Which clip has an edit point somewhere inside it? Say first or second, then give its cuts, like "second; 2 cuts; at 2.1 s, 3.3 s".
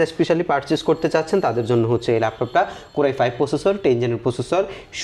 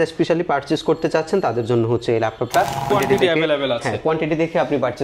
second; 1 cut; at 2.9 s